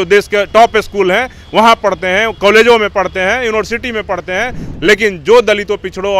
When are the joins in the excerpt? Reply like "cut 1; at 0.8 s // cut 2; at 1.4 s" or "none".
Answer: cut 1; at 4.6 s